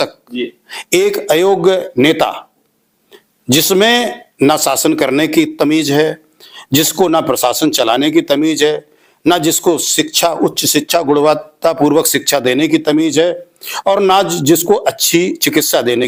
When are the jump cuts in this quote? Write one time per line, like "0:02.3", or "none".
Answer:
none